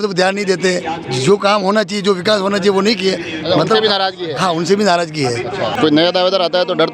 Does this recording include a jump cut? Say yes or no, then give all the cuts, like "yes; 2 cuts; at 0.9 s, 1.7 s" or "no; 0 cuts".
yes; 1 cut; at 5.7 s